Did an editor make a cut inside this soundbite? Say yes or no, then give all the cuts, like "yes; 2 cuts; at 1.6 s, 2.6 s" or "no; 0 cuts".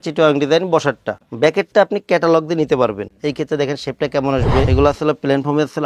yes; 2 cuts; at 3.1 s, 4.7 s